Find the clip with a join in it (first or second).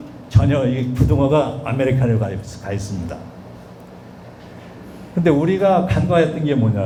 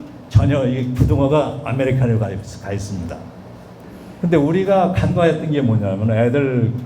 second